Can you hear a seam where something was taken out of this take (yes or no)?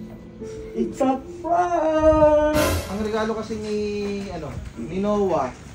yes